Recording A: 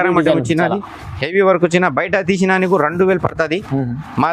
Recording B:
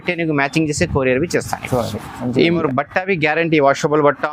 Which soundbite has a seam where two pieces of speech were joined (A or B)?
B